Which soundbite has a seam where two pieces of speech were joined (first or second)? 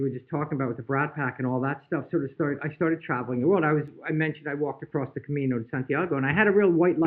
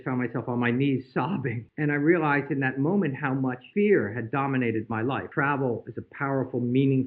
second